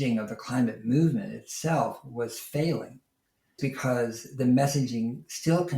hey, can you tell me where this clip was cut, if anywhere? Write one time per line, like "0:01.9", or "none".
0:03.6

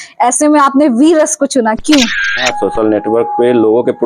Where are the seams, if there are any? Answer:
0:02.5

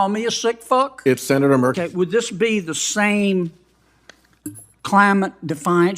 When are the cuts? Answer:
0:01.8

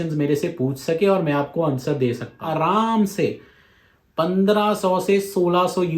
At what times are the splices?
0:02.4

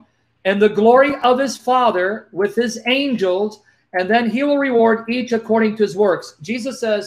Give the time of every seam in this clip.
none

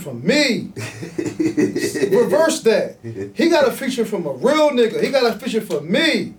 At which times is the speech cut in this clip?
none

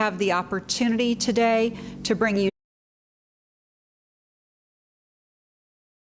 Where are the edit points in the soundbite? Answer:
none

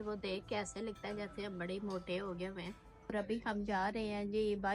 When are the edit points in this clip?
0:03.1

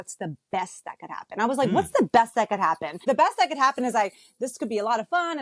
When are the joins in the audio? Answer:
0:03.0

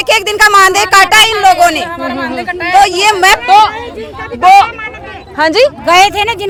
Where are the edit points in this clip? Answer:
none

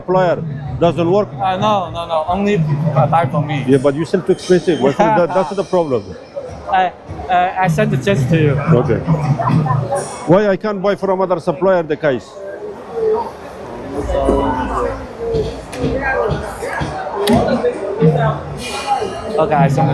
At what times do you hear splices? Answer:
none

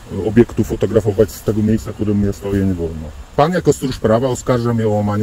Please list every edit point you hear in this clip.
0:03.3

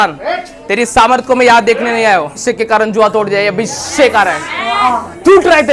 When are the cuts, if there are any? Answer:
0:02.4

